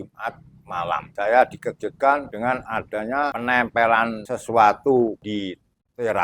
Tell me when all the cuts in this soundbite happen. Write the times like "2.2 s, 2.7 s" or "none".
1.1 s, 2.3 s, 3.3 s, 4.3 s, 5.2 s